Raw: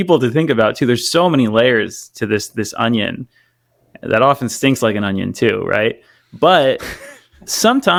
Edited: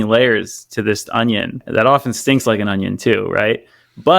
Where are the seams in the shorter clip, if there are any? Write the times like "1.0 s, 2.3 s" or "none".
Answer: 1.0 s